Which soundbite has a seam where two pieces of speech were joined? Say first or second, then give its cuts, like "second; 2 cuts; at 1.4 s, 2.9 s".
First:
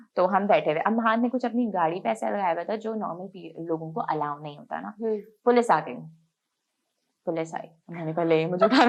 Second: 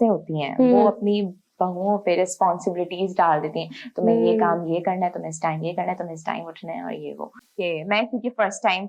second; 1 cut; at 7.3 s